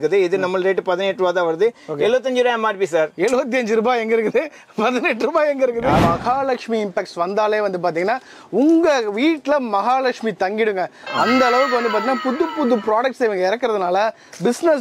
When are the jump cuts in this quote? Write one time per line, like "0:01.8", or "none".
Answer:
0:06.0